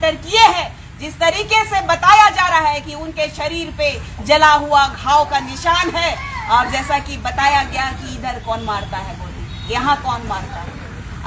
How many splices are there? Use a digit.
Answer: 0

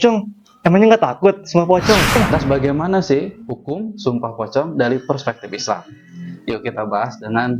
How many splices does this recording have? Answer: 1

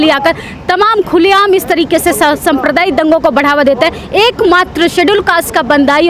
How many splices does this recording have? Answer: 0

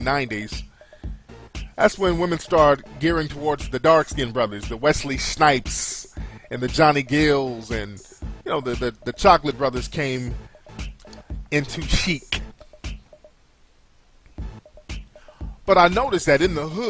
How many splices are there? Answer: 1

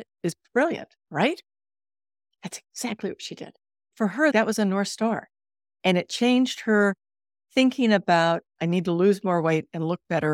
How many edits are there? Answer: 3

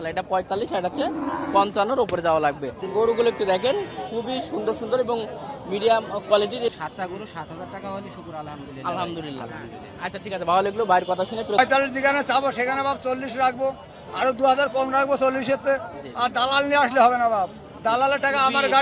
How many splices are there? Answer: 3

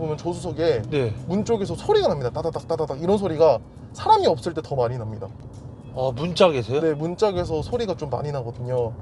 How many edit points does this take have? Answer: 0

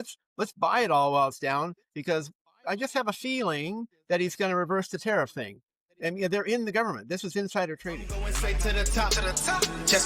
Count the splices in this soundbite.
1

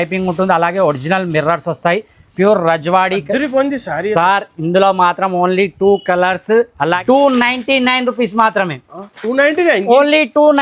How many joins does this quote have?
1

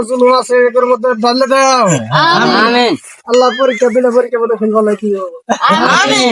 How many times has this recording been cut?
0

